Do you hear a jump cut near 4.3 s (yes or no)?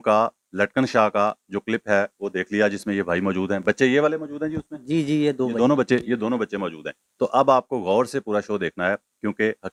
no